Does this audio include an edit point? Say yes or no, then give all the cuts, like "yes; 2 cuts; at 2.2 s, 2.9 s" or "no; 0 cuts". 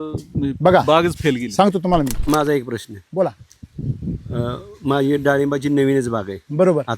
yes; 1 cut; at 2.2 s